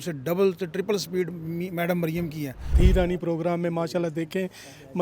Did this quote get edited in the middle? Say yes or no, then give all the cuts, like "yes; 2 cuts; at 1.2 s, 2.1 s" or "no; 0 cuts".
yes; 1 cut; at 2.7 s